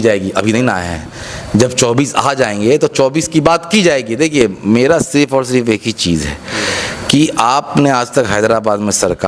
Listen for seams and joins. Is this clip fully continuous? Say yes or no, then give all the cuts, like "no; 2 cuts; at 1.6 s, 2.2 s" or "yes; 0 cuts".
yes; 0 cuts